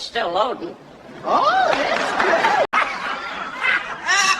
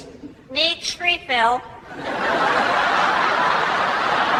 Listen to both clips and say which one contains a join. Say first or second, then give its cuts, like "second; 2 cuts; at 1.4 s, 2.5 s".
first; 1 cut; at 2.7 s